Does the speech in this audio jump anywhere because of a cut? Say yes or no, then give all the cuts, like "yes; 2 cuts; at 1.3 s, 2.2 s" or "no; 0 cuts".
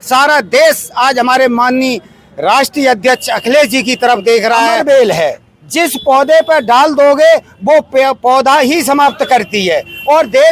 yes; 1 cut; at 4.8 s